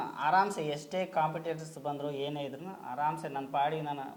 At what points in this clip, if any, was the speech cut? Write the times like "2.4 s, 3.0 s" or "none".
none